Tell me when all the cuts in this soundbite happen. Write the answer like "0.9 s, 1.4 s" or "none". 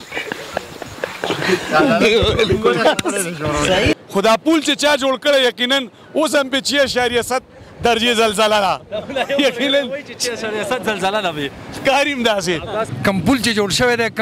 3.9 s, 12.9 s